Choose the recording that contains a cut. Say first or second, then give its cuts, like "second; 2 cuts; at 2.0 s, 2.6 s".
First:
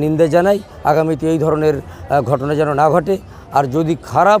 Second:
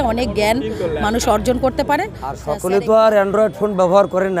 second; 1 cut; at 2.5 s